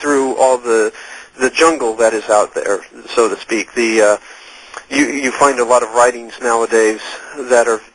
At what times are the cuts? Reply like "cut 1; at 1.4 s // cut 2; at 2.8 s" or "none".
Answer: cut 1; at 3.4 s